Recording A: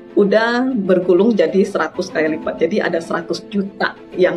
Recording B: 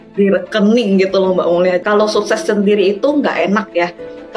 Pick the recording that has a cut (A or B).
B